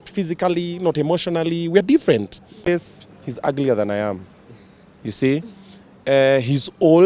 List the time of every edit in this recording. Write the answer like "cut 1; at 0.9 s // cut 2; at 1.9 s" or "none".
cut 1; at 2.7 s